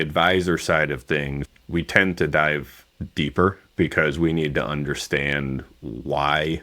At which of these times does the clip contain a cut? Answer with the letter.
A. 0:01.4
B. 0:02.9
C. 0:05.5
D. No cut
A